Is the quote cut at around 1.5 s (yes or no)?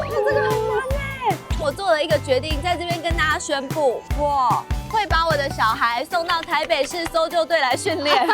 yes